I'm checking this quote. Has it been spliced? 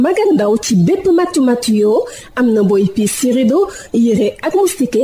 no; 0 cuts

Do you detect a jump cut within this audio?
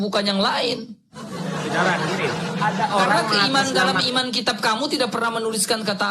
no; 0 cuts

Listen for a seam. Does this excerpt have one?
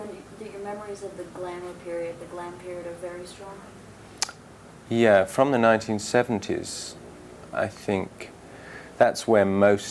no; 0 cuts

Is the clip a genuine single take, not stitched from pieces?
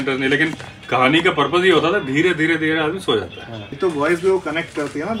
no; 1 cut; at 3.7 s

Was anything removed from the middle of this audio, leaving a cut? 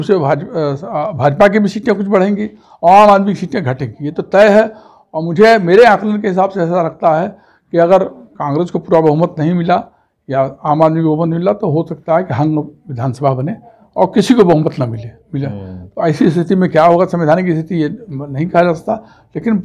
no; 0 cuts

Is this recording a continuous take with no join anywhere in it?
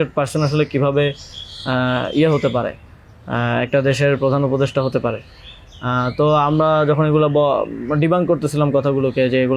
yes; 0 cuts

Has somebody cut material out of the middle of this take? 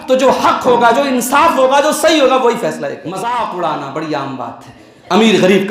yes; 1 cut; at 3.0 s

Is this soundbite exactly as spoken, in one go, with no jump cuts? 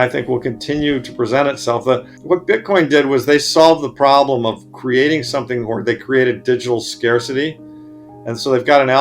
no; 1 cut; at 2.1 s

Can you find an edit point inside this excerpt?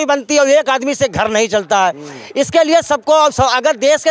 no; 0 cuts

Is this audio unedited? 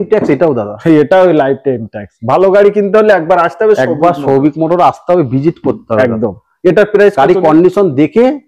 yes; 0 cuts

